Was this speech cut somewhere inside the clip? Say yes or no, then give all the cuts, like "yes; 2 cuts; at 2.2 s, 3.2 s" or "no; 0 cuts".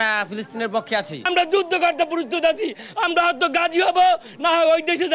yes; 1 cut; at 1.2 s